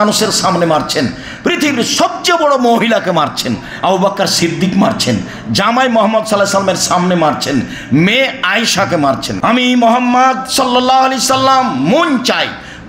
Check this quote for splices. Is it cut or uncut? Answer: cut